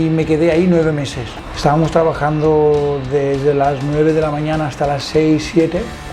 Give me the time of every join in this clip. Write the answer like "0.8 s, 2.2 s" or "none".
1.3 s